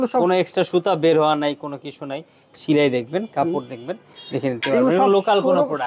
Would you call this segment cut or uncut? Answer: uncut